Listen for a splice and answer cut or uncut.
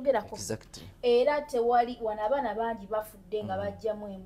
uncut